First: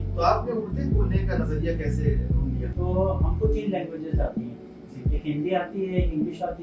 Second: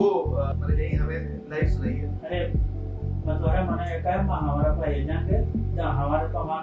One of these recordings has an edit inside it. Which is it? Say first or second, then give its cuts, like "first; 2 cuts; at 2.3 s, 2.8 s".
first; 1 cut; at 2.7 s